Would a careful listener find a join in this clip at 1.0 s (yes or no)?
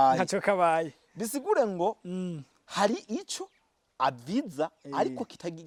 no